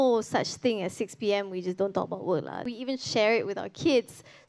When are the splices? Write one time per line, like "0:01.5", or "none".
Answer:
0:02.6